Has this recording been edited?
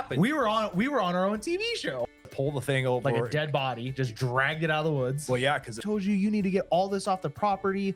yes; 2 cuts; at 2.3 s, 5.8 s

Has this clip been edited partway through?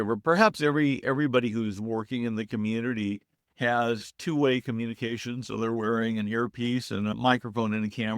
yes; 1 cut; at 7.1 s

